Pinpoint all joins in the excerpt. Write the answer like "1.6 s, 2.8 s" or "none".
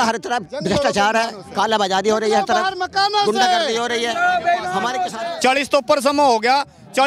5.1 s